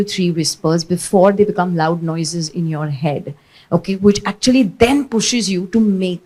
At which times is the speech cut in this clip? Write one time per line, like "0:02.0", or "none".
none